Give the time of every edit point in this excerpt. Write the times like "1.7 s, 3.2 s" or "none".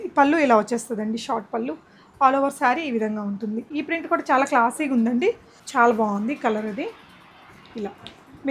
3.7 s